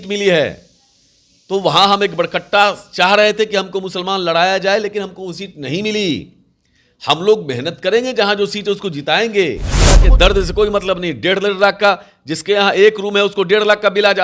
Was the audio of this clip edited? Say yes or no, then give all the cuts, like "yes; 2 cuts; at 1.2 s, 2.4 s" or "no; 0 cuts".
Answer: yes; 1 cut; at 10.0 s